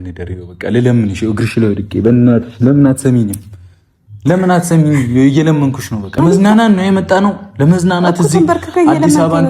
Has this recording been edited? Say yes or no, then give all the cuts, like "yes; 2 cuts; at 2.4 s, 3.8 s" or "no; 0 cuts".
yes; 1 cut; at 6.2 s